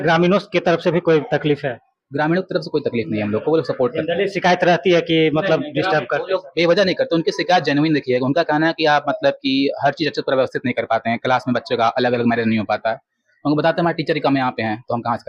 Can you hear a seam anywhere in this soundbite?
no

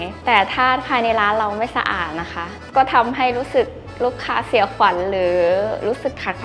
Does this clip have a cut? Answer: no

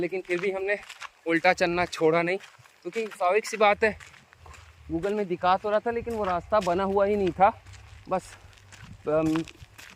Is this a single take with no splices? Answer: yes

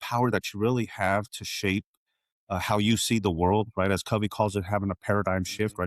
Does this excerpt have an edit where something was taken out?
no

